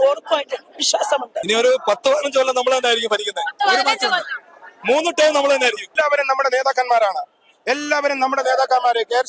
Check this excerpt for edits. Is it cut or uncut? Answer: cut